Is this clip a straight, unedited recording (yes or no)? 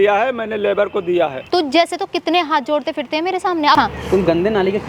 no